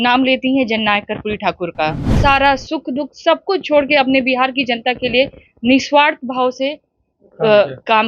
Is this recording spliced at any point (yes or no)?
yes